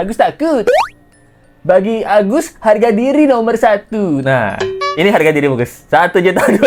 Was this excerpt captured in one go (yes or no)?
yes